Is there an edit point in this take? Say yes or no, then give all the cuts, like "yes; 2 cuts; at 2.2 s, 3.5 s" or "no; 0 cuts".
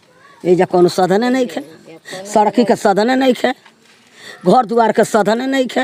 no; 0 cuts